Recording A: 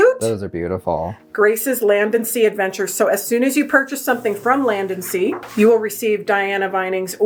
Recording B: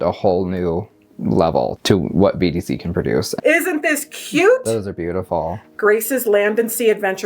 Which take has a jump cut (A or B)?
B